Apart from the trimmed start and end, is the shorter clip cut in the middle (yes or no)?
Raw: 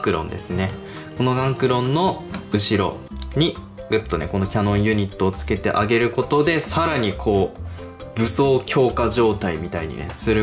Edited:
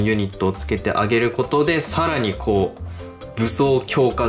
no